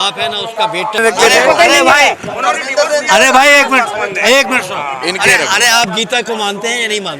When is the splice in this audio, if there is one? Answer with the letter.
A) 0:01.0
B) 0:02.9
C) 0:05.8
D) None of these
A